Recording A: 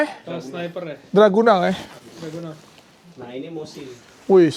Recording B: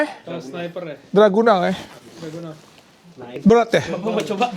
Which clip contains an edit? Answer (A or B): B